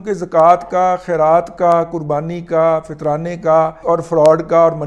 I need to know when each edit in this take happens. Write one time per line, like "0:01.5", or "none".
0:03.8